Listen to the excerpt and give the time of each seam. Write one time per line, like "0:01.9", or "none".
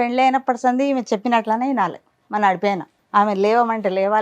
0:02.9